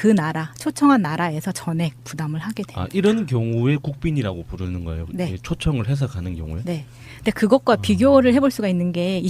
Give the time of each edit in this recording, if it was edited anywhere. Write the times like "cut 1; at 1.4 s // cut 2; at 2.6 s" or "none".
cut 1; at 3.0 s

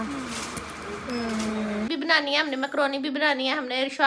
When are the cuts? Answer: cut 1; at 1.9 s

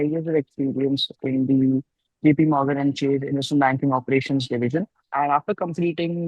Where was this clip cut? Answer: cut 1; at 5.0 s

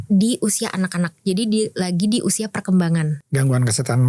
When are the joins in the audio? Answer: cut 1; at 3.2 s

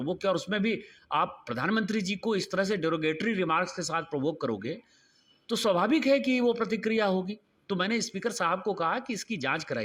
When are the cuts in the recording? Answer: none

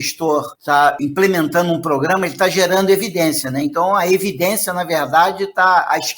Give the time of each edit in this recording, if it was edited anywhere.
cut 1; at 0.9 s

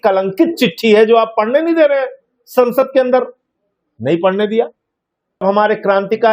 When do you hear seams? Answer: cut 1; at 5.4 s

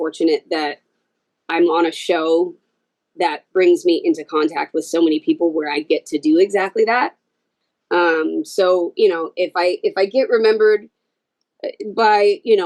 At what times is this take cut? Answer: none

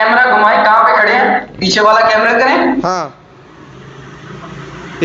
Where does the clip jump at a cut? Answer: none

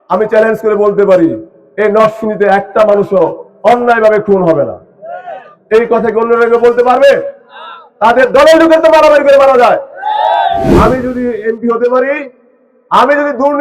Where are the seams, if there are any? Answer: cut 1; at 10.7 s

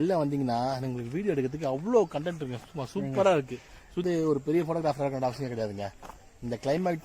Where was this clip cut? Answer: cut 1; at 4.0 s

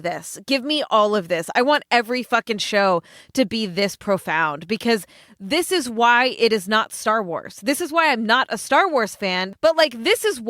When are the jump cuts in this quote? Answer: cut 1; at 9.5 s

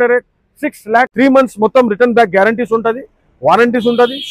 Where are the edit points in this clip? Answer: cut 1; at 1.1 s

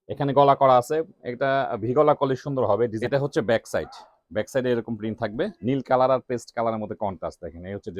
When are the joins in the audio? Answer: cut 1; at 3.0 s // cut 2; at 5.5 s

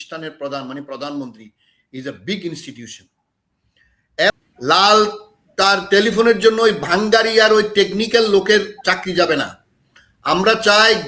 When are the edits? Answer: cut 1; at 4.3 s

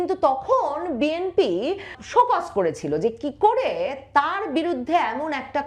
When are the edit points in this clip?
cut 1; at 1.9 s

